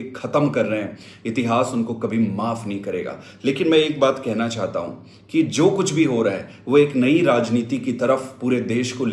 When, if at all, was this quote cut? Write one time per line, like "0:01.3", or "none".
none